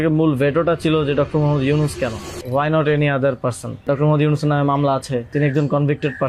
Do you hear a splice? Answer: yes; 3 cuts; at 2.3 s, 3.8 s, 5.3 s

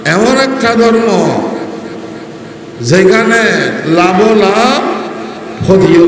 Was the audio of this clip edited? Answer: no; 0 cuts

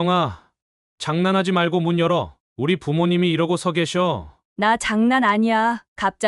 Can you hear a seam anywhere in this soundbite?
no; 0 cuts

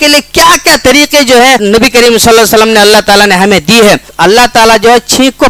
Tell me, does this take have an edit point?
yes; 2 cuts; at 1.6 s, 4.1 s

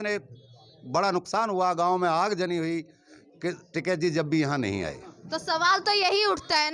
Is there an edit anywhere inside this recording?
no; 0 cuts

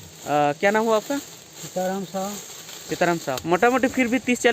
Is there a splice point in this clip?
yes; 1 cut; at 3.4 s

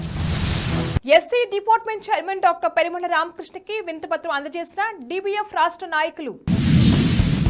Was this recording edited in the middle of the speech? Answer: yes; 1 cut; at 0.9 s

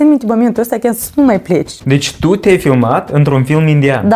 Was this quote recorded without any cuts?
no; 1 cut; at 1.7 s

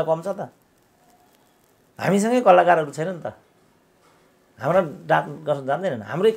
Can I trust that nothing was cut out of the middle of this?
yes; 0 cuts

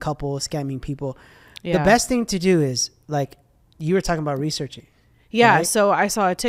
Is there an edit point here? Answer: no; 0 cuts

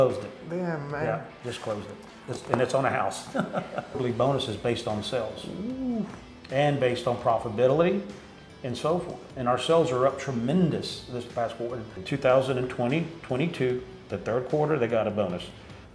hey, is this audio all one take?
no; 2 cuts; at 3.9 s, 11.9 s

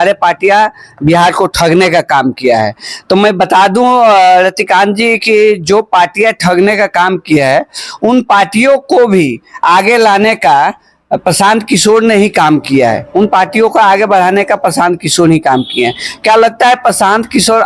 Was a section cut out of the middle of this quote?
no; 0 cuts

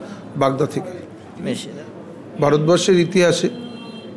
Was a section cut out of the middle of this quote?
yes; 1 cut; at 1.7 s

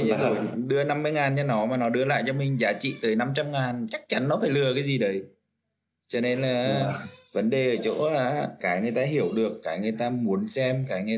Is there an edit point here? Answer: yes; 1 cut; at 8.6 s

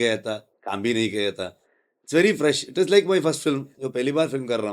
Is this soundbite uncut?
yes; 0 cuts

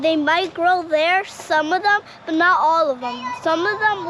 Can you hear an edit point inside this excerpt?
no; 0 cuts

